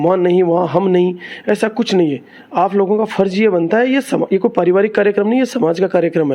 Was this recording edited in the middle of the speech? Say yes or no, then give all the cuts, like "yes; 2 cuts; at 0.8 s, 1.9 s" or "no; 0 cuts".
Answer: no; 0 cuts